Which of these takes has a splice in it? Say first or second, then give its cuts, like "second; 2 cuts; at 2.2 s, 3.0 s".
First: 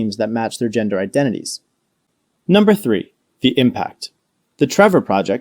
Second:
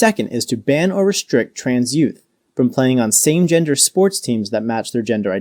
first; 1 cut; at 2.0 s